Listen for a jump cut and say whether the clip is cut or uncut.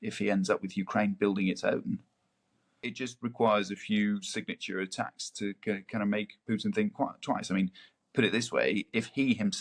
cut